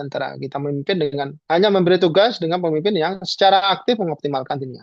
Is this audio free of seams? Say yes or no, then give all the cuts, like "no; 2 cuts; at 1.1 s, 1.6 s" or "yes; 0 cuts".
yes; 0 cuts